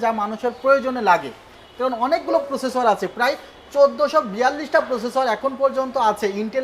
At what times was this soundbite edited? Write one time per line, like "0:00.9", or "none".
none